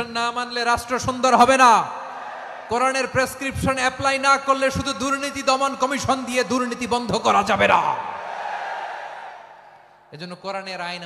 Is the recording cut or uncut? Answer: uncut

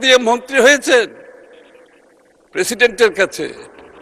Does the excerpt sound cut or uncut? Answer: uncut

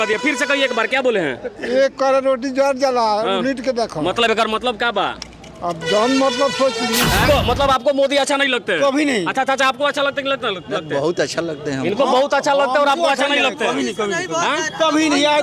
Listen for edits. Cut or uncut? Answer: cut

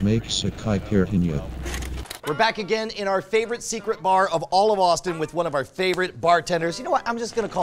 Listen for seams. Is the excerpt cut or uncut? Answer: uncut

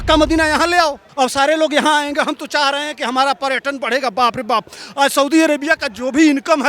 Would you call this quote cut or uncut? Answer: cut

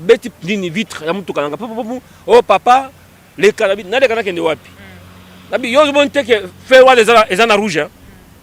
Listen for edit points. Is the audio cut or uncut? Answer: uncut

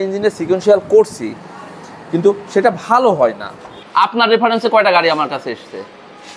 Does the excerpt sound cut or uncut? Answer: cut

